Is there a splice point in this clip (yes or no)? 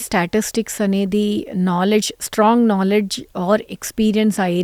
no